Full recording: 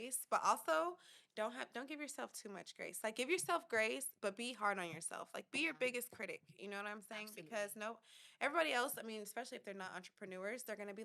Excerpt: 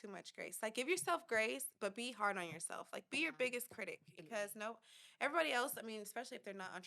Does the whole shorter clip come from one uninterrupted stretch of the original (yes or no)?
no